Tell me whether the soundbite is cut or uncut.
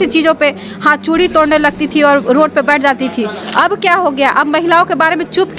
uncut